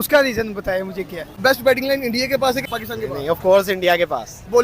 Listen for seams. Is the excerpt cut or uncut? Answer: cut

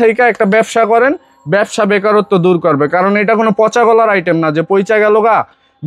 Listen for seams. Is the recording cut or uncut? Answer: uncut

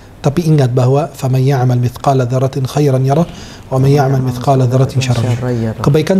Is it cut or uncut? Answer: uncut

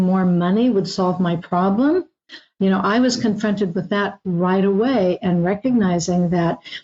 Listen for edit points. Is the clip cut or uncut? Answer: uncut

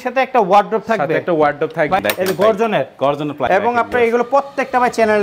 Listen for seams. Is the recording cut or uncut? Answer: cut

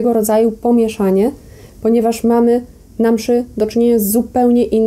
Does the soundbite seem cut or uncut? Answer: uncut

